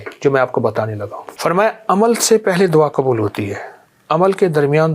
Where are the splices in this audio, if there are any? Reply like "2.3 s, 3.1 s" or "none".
1.2 s